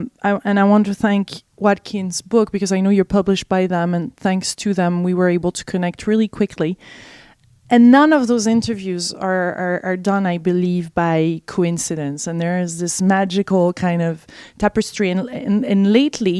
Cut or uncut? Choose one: uncut